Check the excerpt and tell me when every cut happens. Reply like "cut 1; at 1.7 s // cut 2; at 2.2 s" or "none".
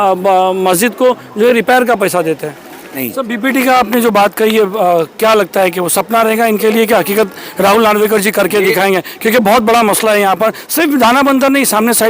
cut 1; at 3.1 s